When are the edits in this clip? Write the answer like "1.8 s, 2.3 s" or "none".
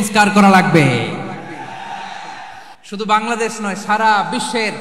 2.7 s